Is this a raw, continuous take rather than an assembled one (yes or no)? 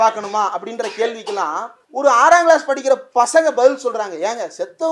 no